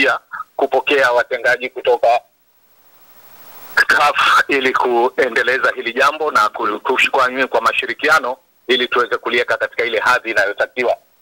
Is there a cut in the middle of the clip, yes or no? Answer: no